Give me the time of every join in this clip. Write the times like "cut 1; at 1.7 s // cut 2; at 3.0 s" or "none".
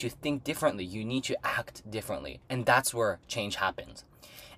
cut 1; at 2.4 s